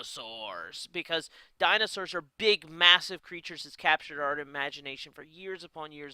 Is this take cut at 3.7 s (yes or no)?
no